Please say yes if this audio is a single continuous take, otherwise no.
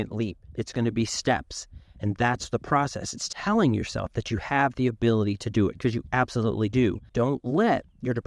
no